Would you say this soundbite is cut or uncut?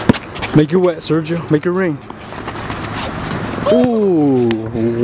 uncut